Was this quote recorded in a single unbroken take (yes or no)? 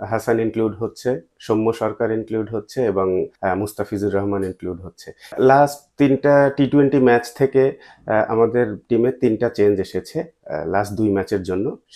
no